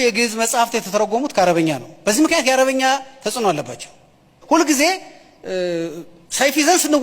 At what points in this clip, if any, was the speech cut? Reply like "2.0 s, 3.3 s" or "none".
4.3 s